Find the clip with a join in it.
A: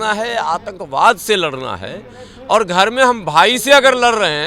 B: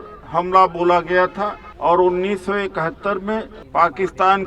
B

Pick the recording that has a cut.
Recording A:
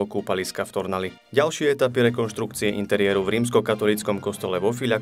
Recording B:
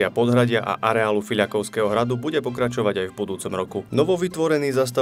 B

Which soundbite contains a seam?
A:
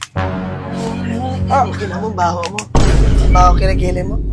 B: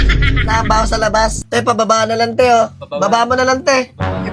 B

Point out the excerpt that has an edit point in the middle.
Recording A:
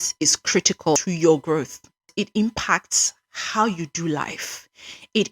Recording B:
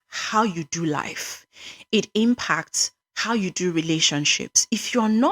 A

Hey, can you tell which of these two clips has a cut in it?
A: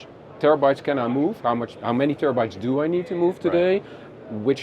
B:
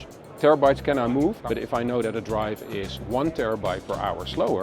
B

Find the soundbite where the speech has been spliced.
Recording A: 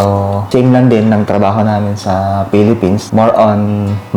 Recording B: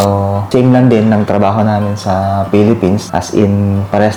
A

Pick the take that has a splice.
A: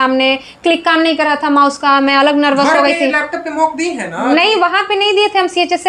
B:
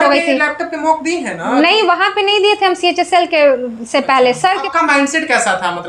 B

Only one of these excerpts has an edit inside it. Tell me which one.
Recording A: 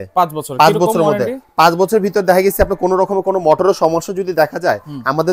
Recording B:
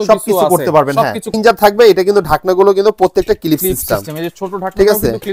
B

